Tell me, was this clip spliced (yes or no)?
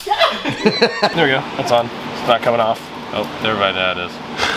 yes